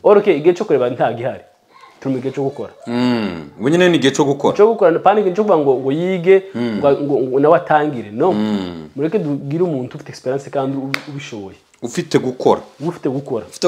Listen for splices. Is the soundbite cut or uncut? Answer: uncut